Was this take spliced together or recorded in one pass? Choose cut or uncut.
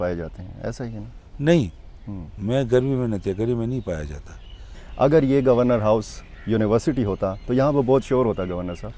cut